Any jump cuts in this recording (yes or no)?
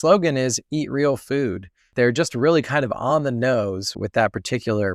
yes